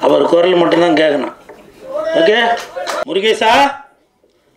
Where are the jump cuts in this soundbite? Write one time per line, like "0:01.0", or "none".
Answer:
0:03.0